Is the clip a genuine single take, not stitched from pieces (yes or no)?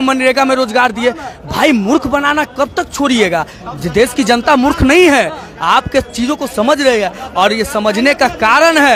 yes